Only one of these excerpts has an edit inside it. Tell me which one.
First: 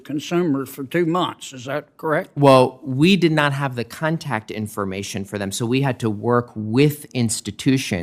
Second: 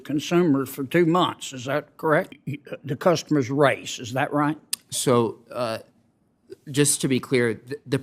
second; 1 cut; at 2.3 s

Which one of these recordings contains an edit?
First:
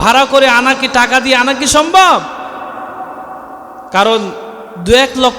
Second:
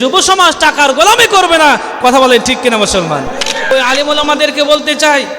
second; 1 cut; at 3.7 s

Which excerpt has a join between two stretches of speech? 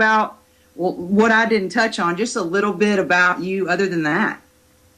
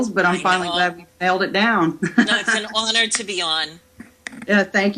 second; 1 cut; at 1.0 s

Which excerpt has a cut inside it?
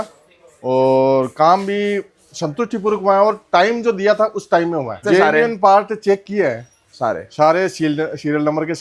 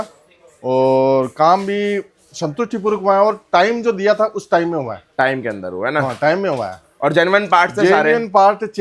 first; 1 cut; at 5.0 s

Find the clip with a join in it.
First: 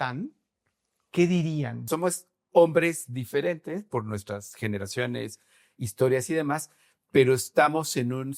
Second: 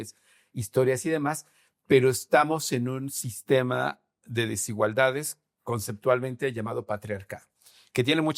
first; 1 cut; at 1.8 s

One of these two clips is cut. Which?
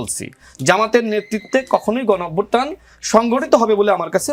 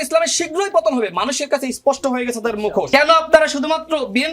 second; 1 cut; at 2.9 s

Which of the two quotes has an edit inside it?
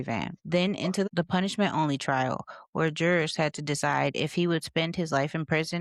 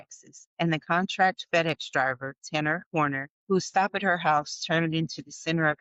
first; 1 cut; at 1.1 s

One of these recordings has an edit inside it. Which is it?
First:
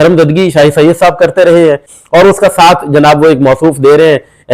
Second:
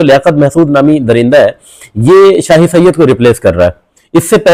first; 1 cut; at 1.9 s

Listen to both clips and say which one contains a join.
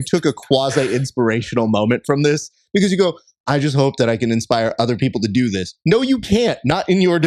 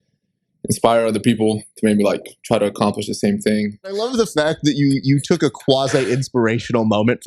second; 1 cut; at 4.0 s

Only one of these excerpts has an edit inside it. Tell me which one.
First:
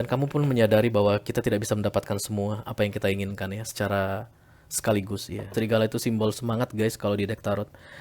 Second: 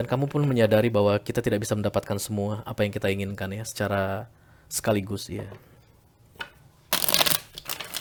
first; 1 cut; at 5.5 s

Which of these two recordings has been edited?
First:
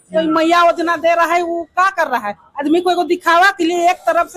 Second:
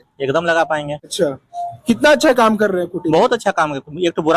second; 1 cut; at 1.0 s

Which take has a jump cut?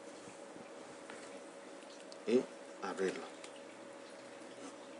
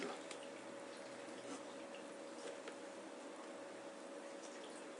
first; 1 cut; at 1.9 s

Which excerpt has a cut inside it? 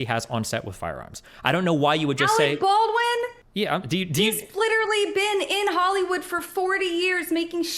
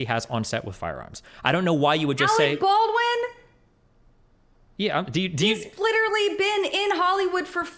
first; 1 cut; at 3.4 s

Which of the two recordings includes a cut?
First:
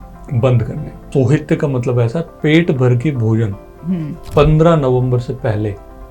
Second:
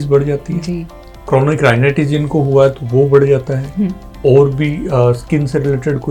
first; 1 cut; at 1.1 s

